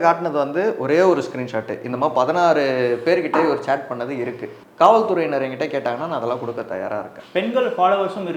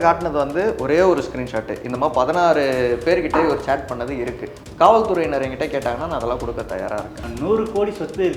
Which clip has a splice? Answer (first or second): second